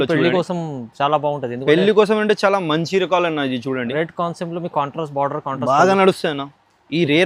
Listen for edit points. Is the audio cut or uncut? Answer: uncut